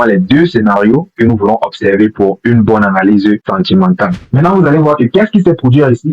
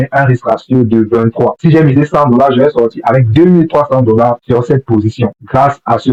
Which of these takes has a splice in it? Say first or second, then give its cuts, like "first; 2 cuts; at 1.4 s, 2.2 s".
first; 1 cut; at 4.3 s